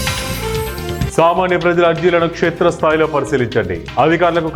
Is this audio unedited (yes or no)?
yes